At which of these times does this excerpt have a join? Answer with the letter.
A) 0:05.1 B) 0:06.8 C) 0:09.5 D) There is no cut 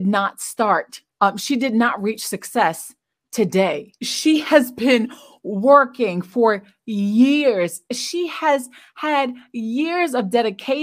D